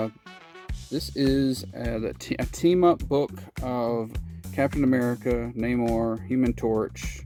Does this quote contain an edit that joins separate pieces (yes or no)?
no